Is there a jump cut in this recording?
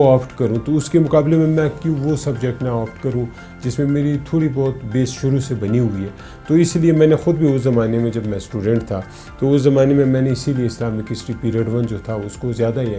no; 0 cuts

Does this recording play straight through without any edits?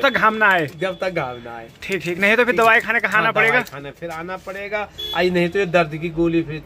yes; 0 cuts

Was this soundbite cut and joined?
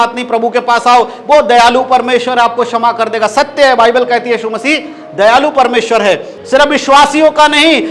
yes; 1 cut; at 6.3 s

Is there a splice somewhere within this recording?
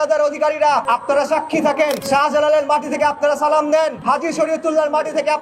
yes; 3 cuts; at 0.8 s, 2.0 s, 4.0 s

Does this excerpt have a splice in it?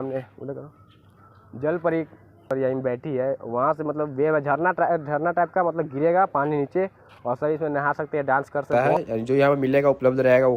yes; 1 cut; at 8.7 s

